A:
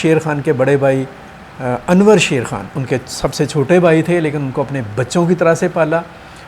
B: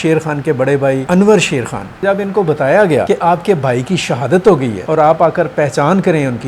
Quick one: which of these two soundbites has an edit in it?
B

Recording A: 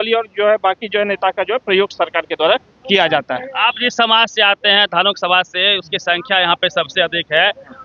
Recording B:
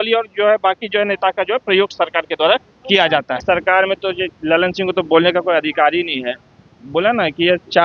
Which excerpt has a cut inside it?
B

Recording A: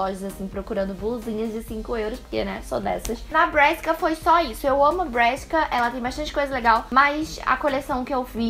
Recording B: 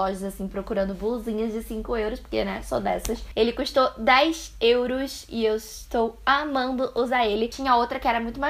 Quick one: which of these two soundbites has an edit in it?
B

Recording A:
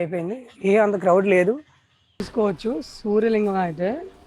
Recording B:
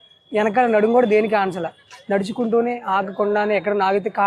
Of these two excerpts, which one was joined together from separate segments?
A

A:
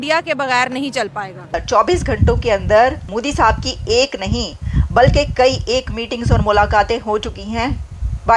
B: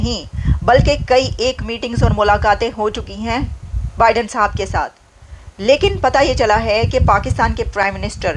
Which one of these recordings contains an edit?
A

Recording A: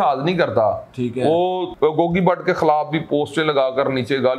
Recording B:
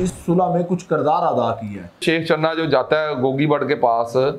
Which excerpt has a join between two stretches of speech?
B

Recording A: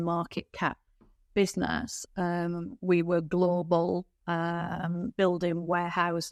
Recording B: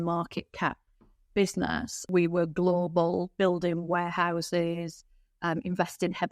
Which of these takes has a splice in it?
B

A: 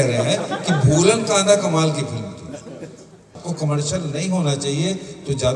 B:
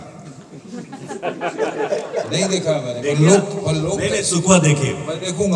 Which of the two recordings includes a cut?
A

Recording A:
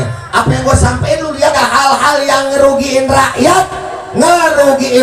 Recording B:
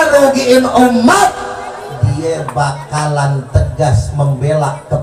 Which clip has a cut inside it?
A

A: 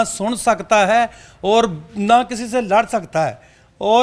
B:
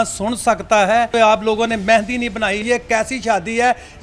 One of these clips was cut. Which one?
B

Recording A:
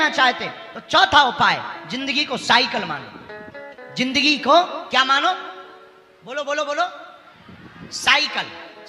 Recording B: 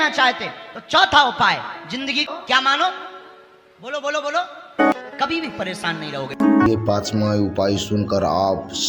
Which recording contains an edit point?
B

